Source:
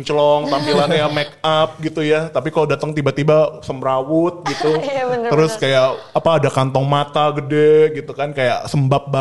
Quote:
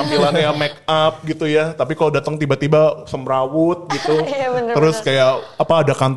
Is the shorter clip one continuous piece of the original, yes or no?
yes